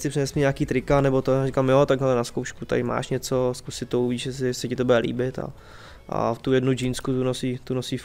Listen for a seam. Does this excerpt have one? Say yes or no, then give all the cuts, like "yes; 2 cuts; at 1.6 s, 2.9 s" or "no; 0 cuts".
no; 0 cuts